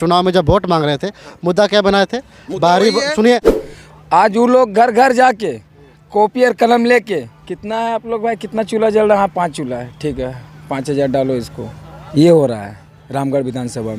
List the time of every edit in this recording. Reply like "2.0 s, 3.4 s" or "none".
3.5 s